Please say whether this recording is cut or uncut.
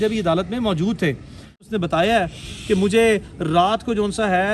cut